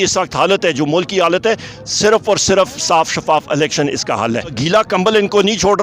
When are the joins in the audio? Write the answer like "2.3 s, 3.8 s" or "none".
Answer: 4.6 s